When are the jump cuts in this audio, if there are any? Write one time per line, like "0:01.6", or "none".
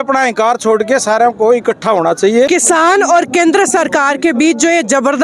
0:02.5